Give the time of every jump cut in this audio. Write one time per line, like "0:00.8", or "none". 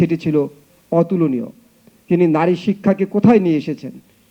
none